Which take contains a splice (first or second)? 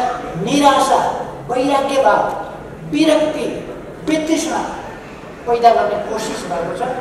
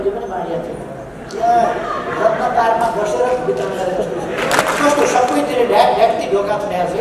second